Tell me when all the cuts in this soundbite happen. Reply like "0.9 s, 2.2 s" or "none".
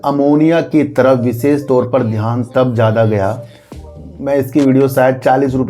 4.0 s